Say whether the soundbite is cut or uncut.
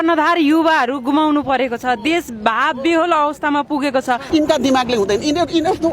cut